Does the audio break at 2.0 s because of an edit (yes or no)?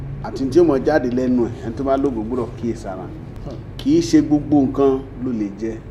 no